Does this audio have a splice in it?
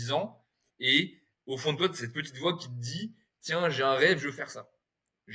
no; 0 cuts

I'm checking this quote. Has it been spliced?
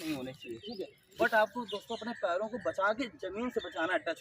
yes; 1 cut; at 1.0 s

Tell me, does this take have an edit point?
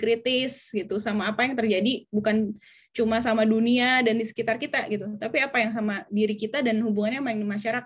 no; 0 cuts

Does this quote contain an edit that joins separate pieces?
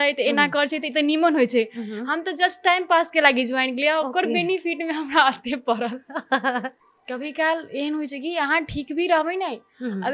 yes; 1 cut; at 6.8 s

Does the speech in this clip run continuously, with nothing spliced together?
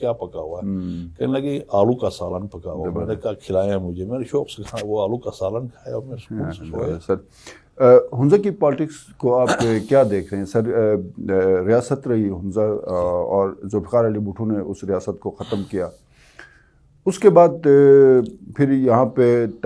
yes; 0 cuts

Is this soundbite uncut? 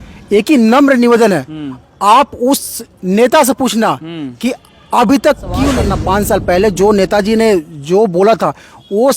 no; 1 cut; at 5.9 s

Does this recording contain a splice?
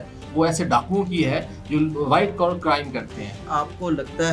no; 0 cuts

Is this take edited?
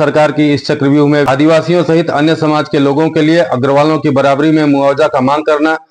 yes; 1 cut; at 1.3 s

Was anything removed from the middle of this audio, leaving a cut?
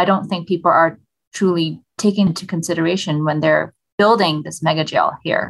yes; 1 cut; at 2.3 s

